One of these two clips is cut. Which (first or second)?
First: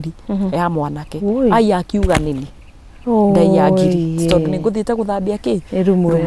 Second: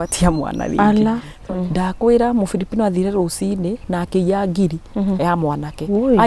second